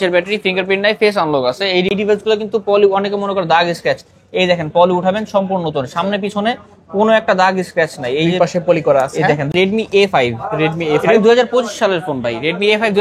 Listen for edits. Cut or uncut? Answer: cut